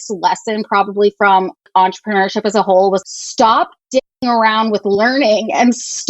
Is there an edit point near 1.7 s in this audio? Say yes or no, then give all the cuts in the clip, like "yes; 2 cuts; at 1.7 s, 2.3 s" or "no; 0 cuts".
yes; 2 cuts; at 1.7 s, 3.0 s